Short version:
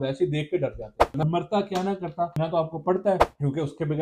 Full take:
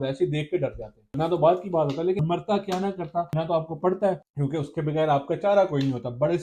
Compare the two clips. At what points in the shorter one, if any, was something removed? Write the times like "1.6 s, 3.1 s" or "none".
1.2 s